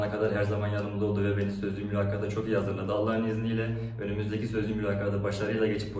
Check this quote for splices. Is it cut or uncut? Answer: uncut